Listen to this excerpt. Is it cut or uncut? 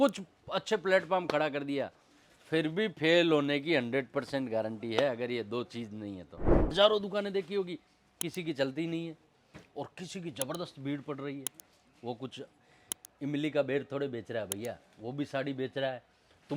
cut